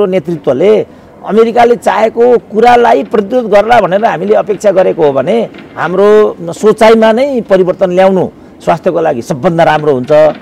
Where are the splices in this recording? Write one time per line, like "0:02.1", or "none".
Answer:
none